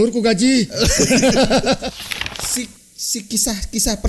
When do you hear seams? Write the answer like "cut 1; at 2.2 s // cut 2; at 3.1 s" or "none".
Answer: cut 1; at 1.9 s